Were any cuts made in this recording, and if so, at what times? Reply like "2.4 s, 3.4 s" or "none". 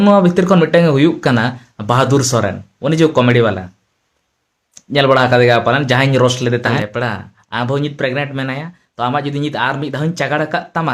6.8 s

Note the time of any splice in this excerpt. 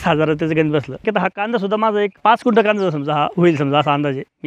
1.0 s, 2.2 s

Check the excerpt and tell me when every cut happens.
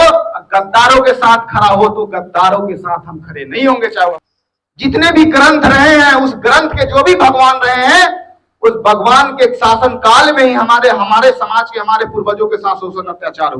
4.2 s

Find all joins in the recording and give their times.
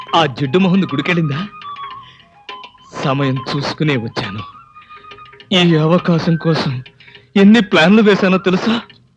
none

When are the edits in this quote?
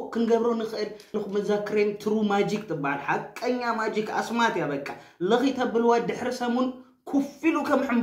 1.1 s

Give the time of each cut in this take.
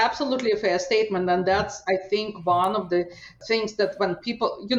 none

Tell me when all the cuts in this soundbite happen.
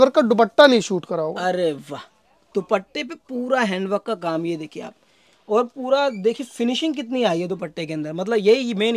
none

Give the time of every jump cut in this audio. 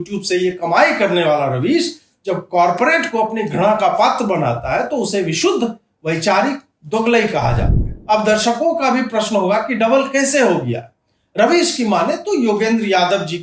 7.9 s

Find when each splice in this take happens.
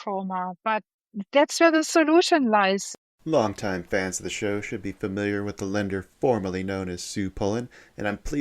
2.9 s

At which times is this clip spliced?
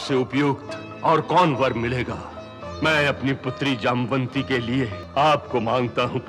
2.6 s, 5.0 s

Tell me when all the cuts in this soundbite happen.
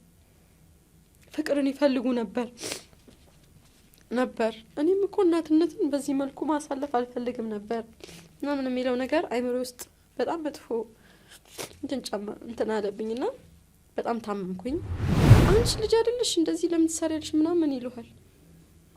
15.3 s

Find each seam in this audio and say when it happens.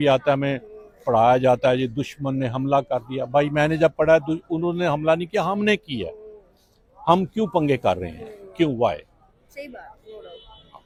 none

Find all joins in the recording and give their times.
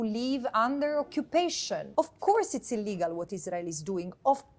1.9 s

